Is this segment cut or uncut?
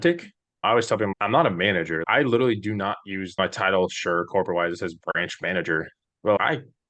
cut